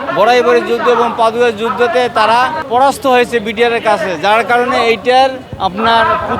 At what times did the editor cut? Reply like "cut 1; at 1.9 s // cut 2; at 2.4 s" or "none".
cut 1; at 2.6 s // cut 2; at 5.5 s